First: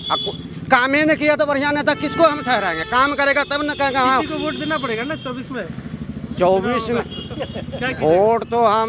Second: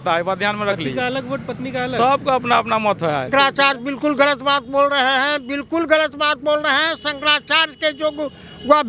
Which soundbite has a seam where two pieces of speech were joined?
second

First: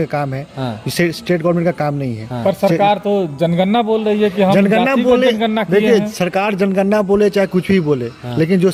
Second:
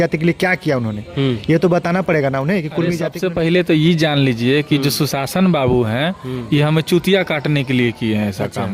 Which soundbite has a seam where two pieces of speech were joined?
second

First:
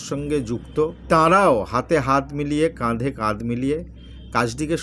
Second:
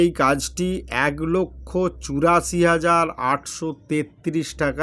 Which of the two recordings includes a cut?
first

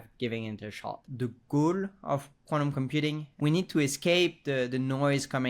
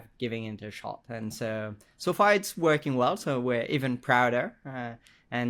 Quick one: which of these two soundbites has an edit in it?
first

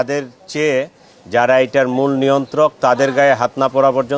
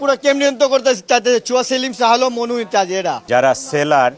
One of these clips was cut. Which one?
second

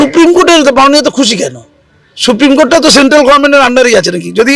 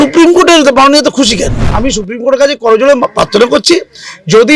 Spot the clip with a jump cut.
second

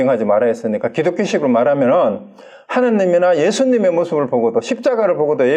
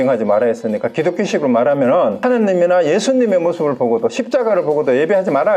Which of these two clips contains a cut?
second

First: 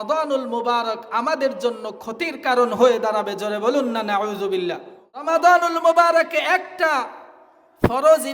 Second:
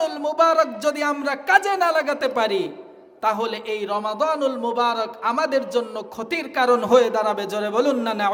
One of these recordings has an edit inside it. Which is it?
first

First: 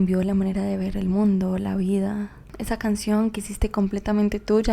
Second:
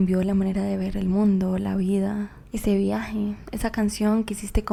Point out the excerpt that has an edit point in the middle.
first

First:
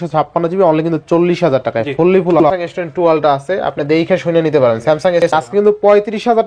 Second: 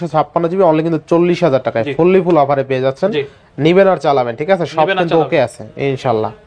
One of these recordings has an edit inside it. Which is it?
first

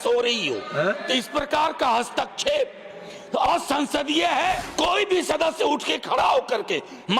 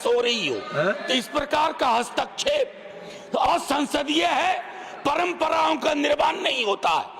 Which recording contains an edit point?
first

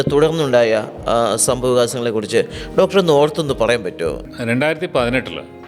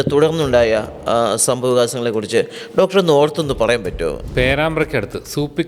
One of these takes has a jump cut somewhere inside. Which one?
second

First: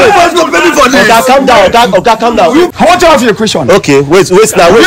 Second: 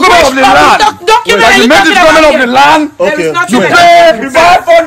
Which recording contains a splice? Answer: first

